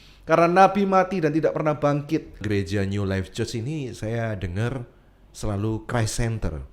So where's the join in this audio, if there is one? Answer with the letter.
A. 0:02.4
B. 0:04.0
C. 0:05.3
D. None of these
A